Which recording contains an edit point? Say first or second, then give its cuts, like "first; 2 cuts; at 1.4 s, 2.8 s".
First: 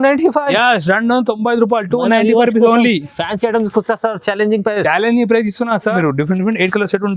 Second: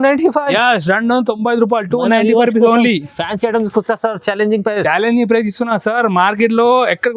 first; 1 cut; at 5.9 s